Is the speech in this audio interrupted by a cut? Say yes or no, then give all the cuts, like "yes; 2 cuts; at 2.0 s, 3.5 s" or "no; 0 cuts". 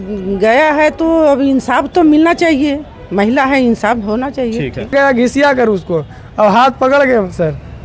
yes; 1 cut; at 4.9 s